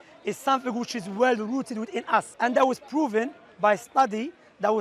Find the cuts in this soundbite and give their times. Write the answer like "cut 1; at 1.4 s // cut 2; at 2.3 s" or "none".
cut 1; at 2.3 s